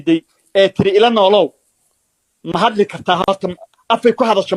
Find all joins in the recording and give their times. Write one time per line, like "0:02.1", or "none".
none